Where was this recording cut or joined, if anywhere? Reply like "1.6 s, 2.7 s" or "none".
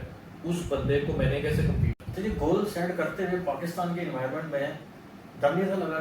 2.0 s